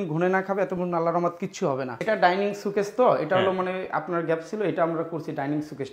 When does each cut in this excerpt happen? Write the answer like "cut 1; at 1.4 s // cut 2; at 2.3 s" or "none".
cut 1; at 2.0 s